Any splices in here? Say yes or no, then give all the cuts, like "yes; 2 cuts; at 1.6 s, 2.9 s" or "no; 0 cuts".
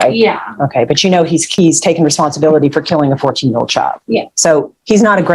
yes; 2 cuts; at 1.5 s, 4.3 s